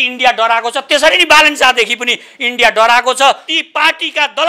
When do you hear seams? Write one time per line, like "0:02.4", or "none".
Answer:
0:03.5